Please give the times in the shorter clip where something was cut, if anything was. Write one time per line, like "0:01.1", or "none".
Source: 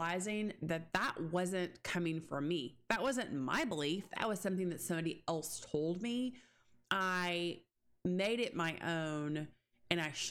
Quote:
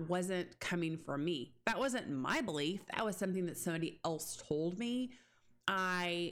none